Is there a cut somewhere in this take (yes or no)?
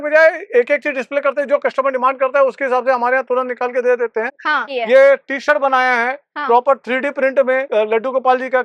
no